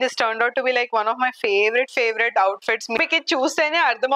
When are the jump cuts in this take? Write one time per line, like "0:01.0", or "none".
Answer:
0:03.0